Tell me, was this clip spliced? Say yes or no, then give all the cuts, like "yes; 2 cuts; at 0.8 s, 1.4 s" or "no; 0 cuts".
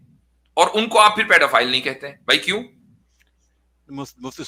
no; 0 cuts